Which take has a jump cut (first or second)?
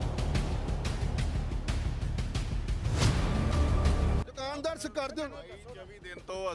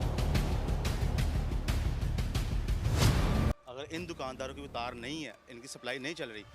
second